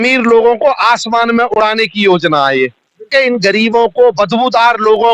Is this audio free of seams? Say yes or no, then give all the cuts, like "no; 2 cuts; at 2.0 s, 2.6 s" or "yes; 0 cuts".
no; 1 cut; at 3.1 s